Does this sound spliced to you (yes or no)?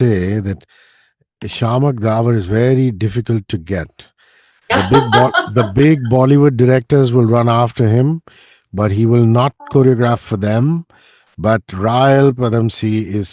no